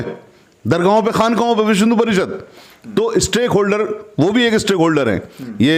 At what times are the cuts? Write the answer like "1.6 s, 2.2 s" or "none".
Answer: none

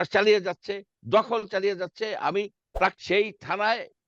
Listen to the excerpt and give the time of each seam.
3.0 s

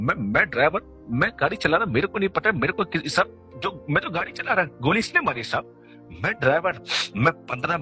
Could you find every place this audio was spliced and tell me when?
none

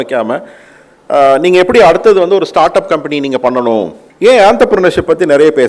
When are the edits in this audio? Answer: 4.0 s

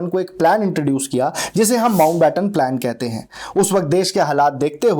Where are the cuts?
none

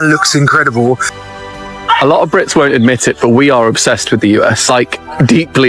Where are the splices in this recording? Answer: 1.5 s

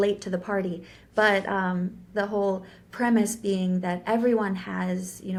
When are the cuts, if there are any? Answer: none

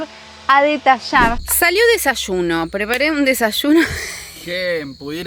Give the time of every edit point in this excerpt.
1.6 s

